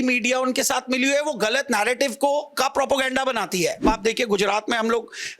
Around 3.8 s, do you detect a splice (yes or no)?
yes